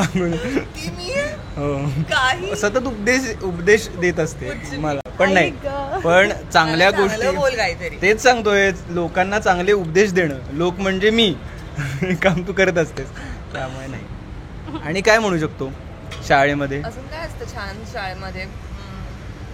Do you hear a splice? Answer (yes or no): no